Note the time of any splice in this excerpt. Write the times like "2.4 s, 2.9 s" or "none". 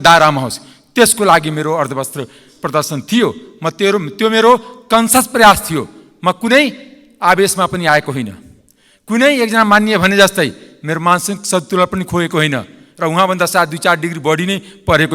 none